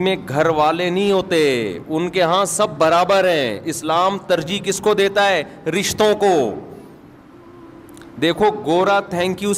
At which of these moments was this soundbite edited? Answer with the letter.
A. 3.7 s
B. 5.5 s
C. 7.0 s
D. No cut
D